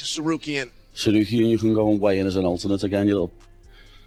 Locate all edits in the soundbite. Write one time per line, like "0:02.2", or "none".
none